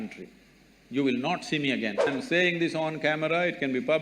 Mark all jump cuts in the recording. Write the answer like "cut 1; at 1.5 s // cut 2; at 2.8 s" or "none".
cut 1; at 2.1 s